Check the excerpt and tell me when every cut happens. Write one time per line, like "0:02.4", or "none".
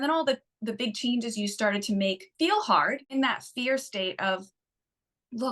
0:02.3
0:03.1